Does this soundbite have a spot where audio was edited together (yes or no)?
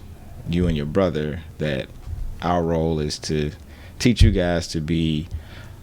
no